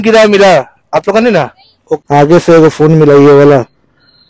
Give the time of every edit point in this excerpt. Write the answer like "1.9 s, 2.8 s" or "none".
2.0 s